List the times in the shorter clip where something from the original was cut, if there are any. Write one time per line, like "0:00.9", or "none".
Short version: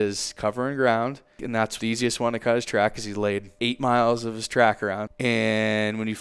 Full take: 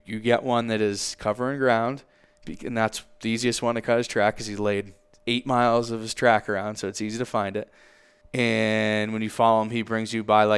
0:01.6
0:03.5
0:05.1